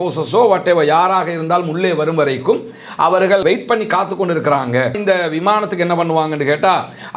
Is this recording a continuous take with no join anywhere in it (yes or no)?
no